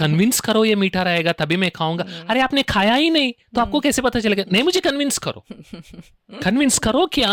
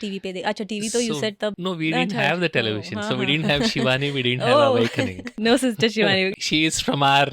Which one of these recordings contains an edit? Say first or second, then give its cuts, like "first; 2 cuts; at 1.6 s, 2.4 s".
second; 3 cuts; at 1.6 s, 5.2 s, 6.3 s